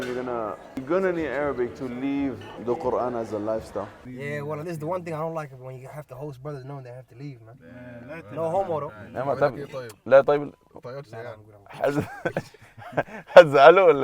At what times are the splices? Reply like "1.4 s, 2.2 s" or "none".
4.0 s